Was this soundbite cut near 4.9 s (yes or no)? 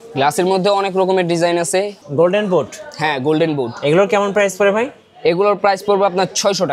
no